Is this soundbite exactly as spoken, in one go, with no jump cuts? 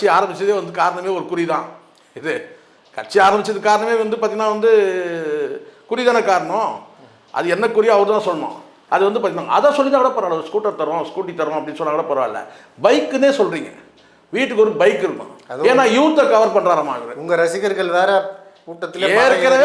no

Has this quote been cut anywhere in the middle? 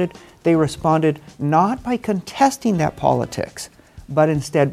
no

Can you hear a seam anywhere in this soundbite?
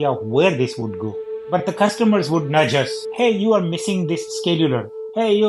no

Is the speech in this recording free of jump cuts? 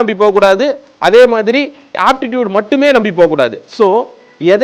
no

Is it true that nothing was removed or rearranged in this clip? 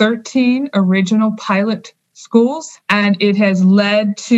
no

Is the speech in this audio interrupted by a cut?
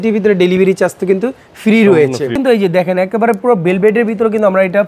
yes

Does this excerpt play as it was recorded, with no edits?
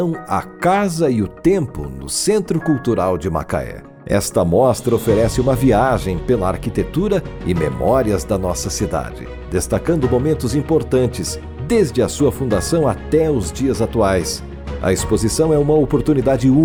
yes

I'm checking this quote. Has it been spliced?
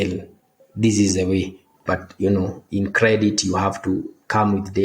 yes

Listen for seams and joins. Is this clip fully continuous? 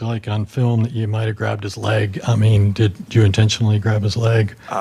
yes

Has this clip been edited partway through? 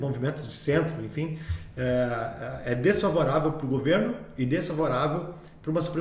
no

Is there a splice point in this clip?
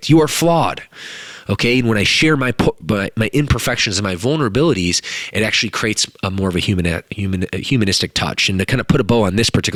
no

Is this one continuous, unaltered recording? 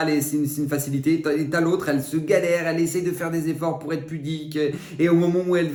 yes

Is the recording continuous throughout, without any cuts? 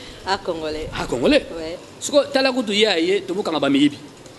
no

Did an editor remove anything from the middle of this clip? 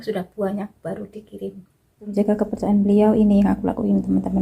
yes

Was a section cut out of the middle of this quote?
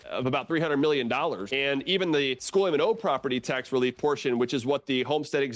yes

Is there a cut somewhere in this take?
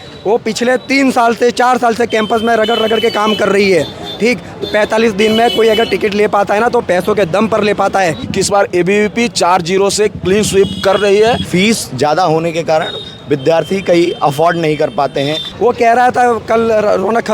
yes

